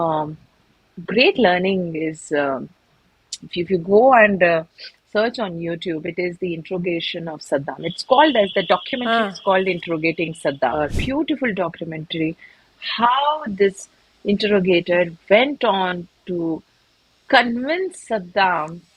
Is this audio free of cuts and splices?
no; 1 cut; at 10.8 s

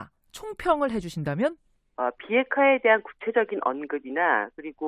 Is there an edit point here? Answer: yes; 1 cut; at 1.5 s

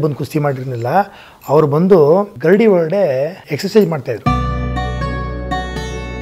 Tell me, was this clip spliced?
yes; 3 cuts; at 2.3 s, 3.4 s, 4.2 s

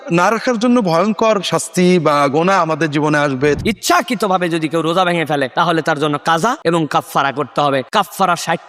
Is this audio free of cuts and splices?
no; 3 cuts; at 3.6 s, 6.6 s, 7.9 s

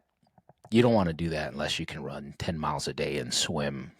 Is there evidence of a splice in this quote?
no; 0 cuts

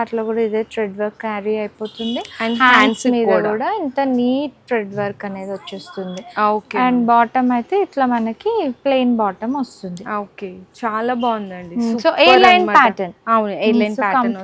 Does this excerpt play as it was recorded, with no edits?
yes; 0 cuts

